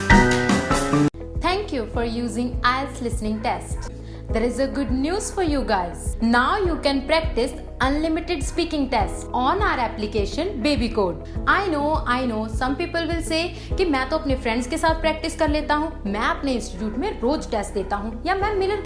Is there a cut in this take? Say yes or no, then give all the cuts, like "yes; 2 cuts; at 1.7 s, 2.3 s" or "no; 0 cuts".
yes; 1 cut; at 1.1 s